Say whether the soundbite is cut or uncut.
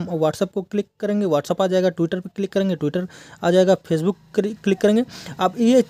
uncut